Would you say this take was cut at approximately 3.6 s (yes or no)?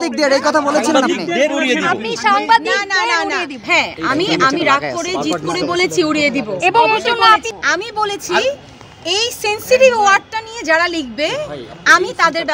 yes